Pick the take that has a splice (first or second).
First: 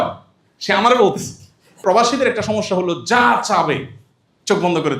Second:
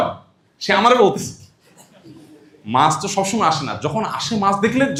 first